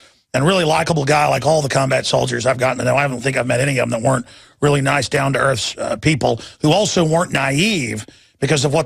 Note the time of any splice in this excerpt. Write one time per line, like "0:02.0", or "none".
0:04.8